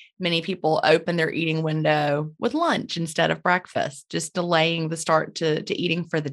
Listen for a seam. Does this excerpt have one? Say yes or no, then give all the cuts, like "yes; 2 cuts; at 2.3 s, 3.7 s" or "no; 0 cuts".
no; 0 cuts